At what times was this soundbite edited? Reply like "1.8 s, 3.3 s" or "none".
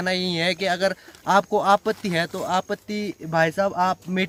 none